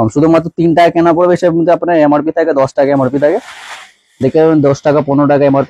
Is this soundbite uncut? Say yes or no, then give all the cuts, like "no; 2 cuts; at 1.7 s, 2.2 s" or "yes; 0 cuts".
yes; 0 cuts